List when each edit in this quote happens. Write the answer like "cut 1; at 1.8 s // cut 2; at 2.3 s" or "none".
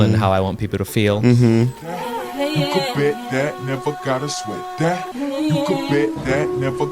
cut 1; at 1.9 s